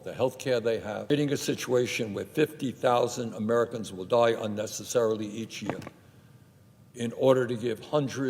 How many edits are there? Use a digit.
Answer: 1